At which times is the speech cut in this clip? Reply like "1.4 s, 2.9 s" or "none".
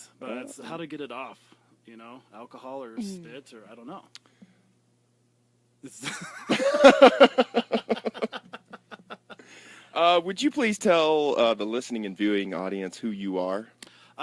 6.0 s